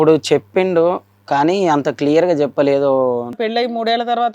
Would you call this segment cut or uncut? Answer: cut